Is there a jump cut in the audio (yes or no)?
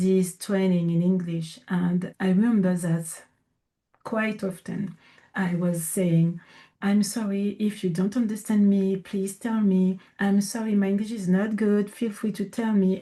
no